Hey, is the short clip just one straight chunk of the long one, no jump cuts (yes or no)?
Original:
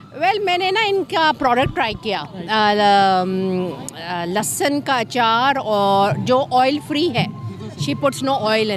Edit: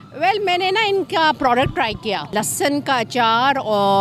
no